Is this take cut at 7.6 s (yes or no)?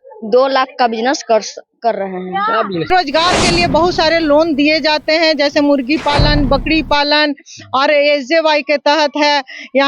no